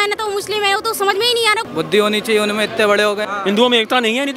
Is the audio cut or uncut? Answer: cut